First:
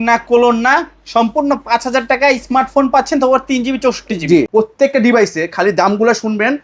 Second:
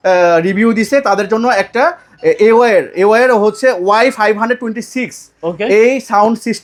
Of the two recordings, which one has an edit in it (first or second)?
first